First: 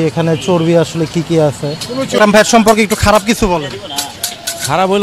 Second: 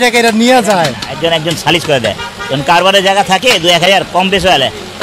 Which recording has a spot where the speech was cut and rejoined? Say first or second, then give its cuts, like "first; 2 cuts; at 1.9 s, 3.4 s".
first; 1 cut; at 2.2 s